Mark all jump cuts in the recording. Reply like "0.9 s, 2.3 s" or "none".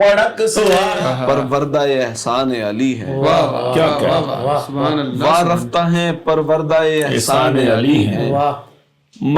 1.0 s